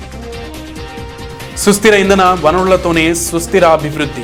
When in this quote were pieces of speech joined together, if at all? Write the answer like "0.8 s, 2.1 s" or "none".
none